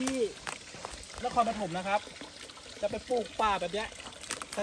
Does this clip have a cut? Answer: no; 0 cuts

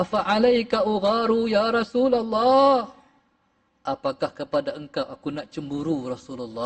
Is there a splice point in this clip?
no; 0 cuts

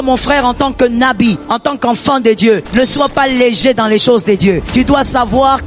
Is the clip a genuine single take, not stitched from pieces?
no; 3 cuts; at 1.5 s, 2.7 s, 4.6 s

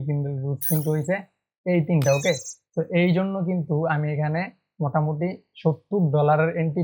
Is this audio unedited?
yes; 0 cuts

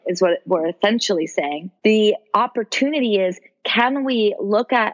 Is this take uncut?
no; 1 cut; at 1.6 s

